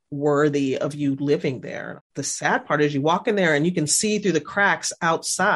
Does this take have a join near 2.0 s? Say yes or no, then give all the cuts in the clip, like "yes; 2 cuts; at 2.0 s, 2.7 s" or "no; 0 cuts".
yes; 1 cut; at 2.0 s